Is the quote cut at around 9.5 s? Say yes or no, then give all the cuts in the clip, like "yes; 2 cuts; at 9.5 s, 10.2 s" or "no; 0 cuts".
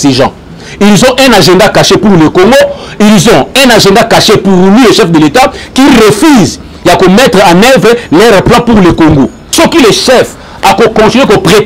yes; 1 cut; at 9.5 s